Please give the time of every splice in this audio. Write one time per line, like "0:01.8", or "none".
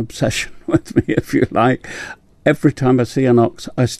none